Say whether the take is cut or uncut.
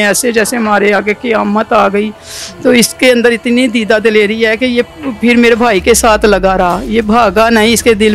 uncut